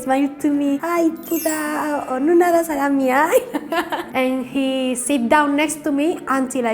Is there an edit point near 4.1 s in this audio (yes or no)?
yes